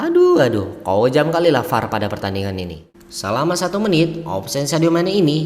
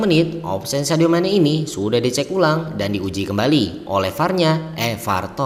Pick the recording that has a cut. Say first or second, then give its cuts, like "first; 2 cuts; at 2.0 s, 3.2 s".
first; 1 cut; at 2.8 s